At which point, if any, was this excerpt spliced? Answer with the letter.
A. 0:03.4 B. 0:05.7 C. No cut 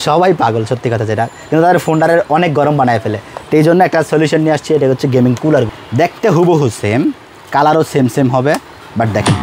B